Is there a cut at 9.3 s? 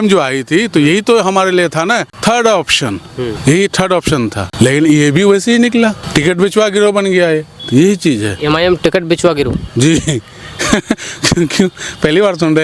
no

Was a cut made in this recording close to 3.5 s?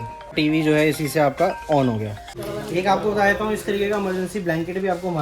no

